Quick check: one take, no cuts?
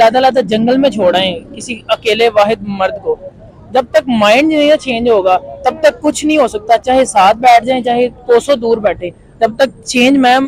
yes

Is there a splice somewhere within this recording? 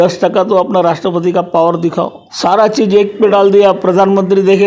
yes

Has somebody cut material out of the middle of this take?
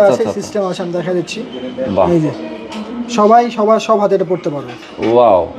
no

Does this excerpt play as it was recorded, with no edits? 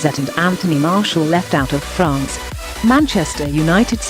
yes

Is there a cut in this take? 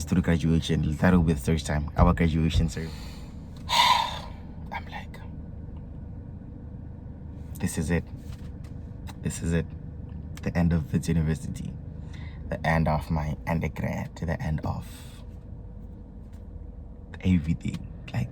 yes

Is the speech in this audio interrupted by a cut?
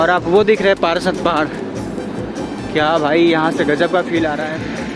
no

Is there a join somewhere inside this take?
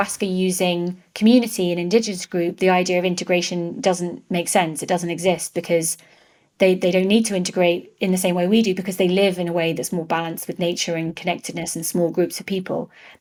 no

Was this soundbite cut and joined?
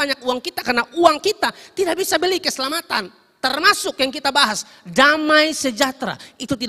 no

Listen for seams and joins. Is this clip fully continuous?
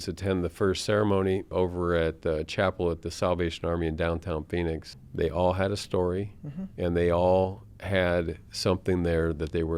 no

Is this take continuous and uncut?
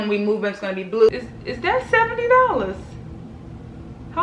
no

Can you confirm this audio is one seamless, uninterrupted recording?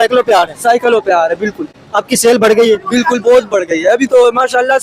yes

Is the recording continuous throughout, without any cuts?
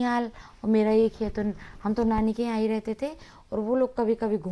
yes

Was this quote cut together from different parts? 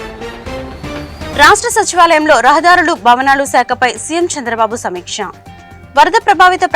yes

